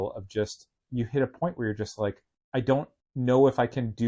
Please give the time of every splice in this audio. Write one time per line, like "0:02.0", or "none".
0:02.3
0:03.0